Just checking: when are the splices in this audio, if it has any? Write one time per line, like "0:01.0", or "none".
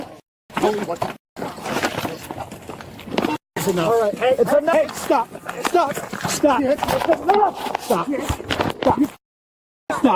none